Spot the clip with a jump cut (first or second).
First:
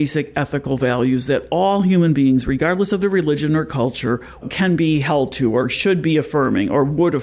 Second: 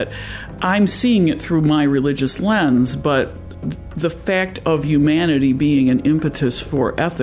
first